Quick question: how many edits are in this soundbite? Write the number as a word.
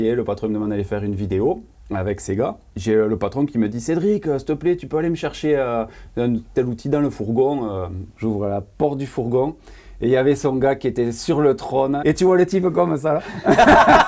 three